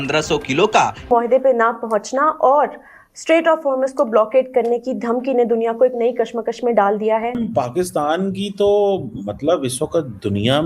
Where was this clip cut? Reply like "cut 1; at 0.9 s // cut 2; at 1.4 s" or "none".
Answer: cut 1; at 1.1 s // cut 2; at 7.4 s